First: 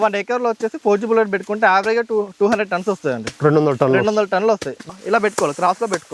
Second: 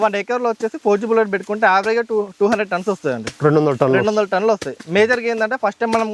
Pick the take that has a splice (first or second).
first